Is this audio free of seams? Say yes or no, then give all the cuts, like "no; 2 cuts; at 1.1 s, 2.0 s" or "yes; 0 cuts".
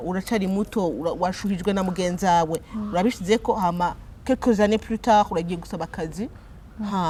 yes; 0 cuts